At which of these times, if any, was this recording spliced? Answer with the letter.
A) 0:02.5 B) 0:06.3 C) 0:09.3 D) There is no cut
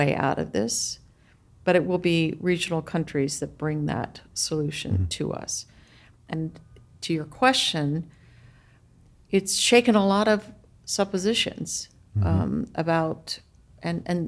B